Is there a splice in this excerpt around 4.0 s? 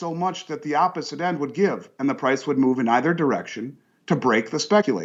no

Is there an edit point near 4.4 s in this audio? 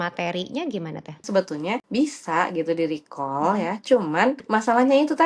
yes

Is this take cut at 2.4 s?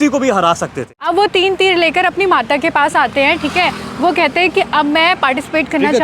no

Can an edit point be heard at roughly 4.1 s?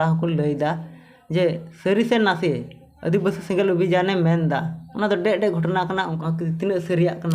no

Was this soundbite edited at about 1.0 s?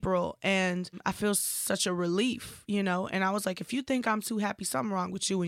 yes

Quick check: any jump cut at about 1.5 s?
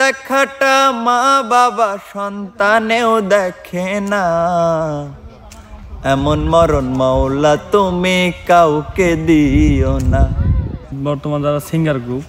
no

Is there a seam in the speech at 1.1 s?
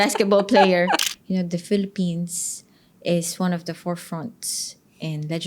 yes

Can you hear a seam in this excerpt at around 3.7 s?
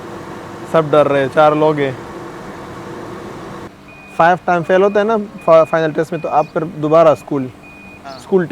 yes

